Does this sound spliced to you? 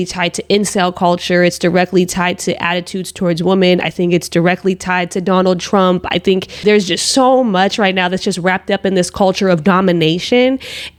no; 0 cuts

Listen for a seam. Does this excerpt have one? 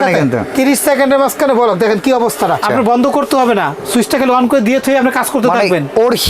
yes; 1 cut; at 2.6 s

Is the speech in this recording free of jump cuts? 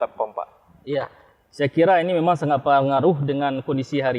yes; 0 cuts

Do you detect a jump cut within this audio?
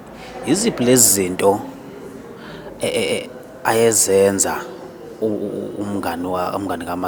no; 0 cuts

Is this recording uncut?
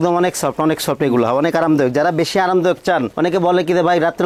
yes; 0 cuts

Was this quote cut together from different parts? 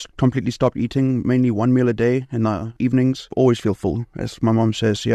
yes; 1 cut; at 3.0 s

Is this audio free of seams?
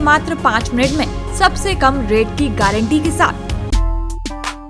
no; 1 cut; at 3.5 s

